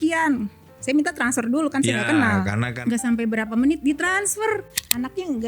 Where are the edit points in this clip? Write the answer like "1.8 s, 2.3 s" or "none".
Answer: 2.7 s, 4.7 s